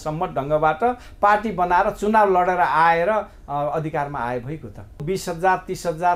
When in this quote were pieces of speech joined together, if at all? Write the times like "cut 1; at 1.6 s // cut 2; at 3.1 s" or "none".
cut 1; at 5.0 s

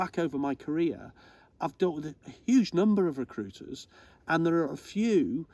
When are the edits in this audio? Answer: none

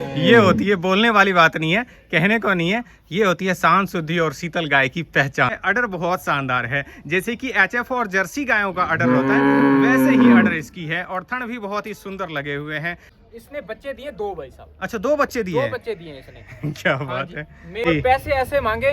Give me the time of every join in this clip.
cut 1; at 5.6 s // cut 2; at 13.1 s // cut 3; at 17.8 s

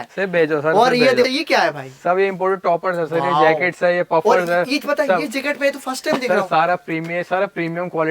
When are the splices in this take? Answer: cut 1; at 1.3 s

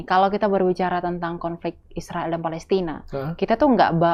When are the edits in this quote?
none

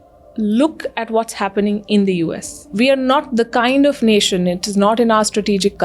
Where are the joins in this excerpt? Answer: cut 1; at 2.7 s

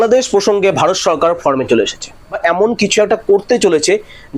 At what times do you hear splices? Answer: cut 1; at 2.2 s

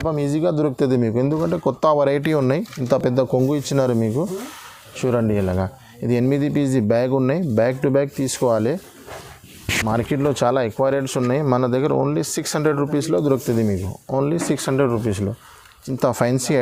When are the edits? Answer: none

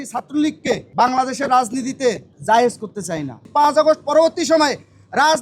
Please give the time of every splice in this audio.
cut 1; at 0.9 s // cut 2; at 2.3 s // cut 3; at 3.4 s

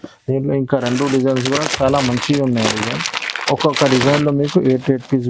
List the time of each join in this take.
none

